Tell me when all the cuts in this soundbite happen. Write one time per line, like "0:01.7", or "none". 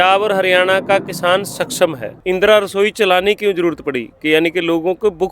0:02.2